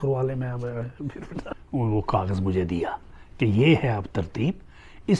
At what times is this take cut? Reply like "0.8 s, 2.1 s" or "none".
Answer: 1.5 s